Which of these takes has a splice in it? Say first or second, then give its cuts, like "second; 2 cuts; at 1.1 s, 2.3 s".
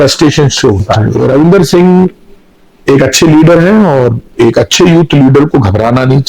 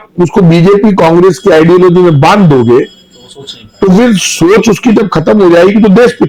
first; 1 cut; at 1.0 s